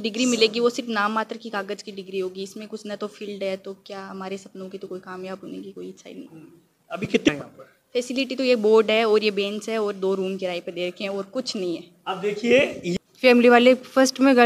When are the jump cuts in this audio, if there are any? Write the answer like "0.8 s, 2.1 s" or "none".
7.3 s, 12.9 s